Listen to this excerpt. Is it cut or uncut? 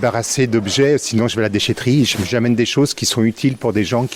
uncut